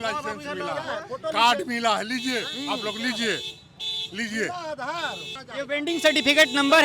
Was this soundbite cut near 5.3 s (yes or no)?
yes